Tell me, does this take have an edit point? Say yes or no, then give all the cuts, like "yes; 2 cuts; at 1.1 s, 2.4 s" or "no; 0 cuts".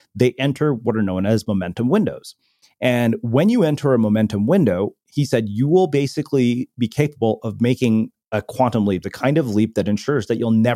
no; 0 cuts